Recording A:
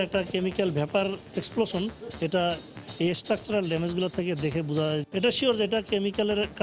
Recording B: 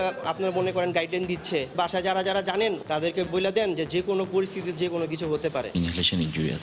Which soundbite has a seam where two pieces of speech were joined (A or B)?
B